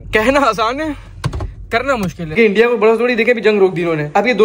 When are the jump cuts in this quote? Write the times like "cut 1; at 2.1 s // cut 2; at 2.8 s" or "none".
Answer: cut 1; at 2.3 s